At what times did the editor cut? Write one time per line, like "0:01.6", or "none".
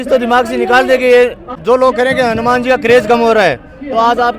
0:01.5